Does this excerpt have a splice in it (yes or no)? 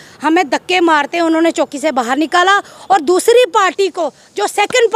no